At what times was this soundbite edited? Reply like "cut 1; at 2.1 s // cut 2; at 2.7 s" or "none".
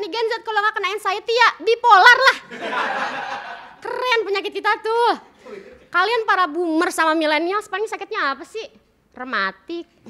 none